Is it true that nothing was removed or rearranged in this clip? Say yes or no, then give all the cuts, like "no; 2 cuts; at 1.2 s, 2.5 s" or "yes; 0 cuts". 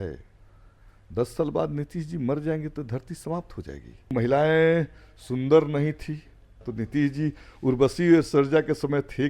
no; 2 cuts; at 4.1 s, 6.7 s